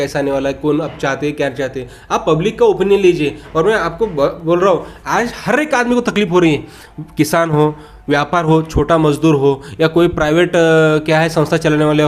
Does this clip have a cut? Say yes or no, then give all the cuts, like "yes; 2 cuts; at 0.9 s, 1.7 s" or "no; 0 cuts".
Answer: no; 0 cuts